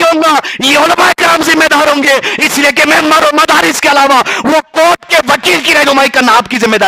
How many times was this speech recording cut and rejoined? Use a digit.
0